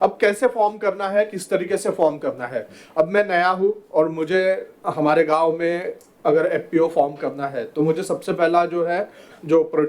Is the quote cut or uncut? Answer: uncut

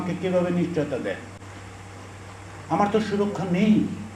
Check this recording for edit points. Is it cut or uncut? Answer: uncut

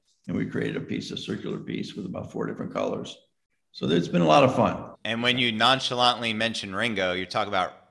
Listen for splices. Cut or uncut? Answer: cut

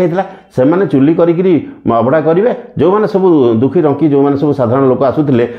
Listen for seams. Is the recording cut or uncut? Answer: uncut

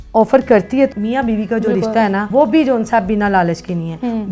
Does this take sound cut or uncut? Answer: cut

